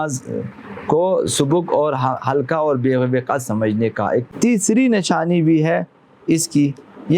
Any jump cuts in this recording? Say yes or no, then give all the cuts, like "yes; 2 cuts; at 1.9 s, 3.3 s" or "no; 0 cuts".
yes; 1 cut; at 4.3 s